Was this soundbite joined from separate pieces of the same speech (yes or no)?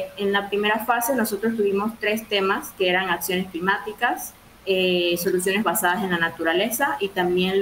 no